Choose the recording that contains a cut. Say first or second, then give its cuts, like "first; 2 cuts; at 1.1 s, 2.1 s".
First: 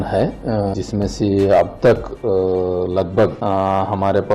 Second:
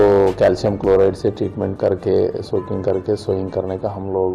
first; 2 cuts; at 0.7 s, 3.4 s